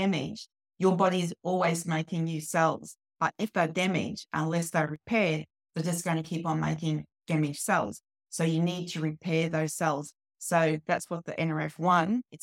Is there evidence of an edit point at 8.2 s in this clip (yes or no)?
no